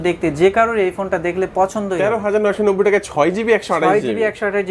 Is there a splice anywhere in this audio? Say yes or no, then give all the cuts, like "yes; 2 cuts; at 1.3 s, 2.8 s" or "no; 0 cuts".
yes; 1 cut; at 2.0 s